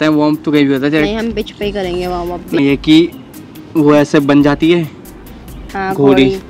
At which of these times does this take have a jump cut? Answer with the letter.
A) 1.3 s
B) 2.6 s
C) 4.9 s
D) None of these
B